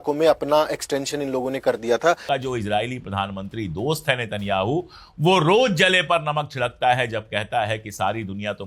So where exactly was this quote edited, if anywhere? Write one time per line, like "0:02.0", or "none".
0:02.2